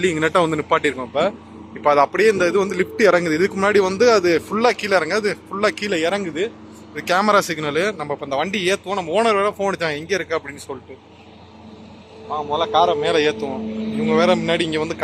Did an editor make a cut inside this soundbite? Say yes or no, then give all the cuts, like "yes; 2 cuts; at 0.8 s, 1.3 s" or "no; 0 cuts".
no; 0 cuts